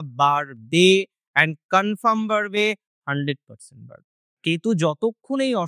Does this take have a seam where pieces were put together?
yes; 1 cut; at 4.4 s

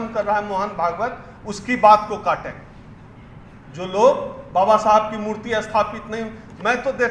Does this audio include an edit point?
no; 0 cuts

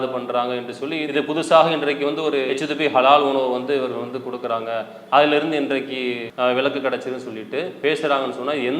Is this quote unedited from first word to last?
no; 2 cuts; at 1.0 s, 7.7 s

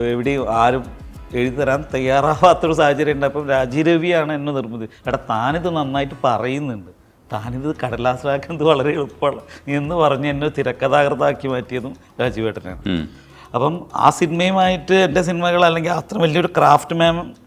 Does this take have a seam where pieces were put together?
no; 0 cuts

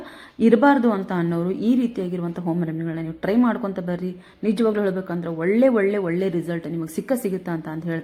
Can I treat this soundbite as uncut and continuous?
yes; 0 cuts

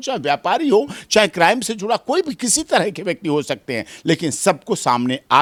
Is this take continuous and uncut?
yes; 0 cuts

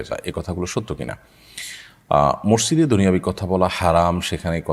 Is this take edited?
no; 0 cuts

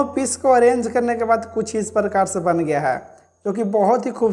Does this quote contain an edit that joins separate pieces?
no; 0 cuts

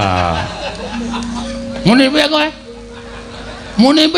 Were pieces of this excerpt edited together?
yes; 1 cut; at 1.4 s

